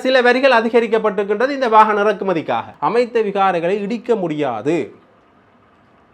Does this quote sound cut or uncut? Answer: cut